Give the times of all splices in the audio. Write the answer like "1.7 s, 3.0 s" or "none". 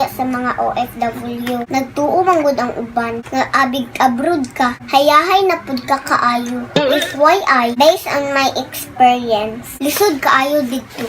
1.7 s, 7.7 s